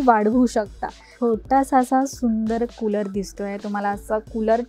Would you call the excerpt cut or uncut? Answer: cut